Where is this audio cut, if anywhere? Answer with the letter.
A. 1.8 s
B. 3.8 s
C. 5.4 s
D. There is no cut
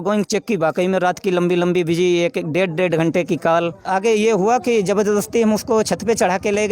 B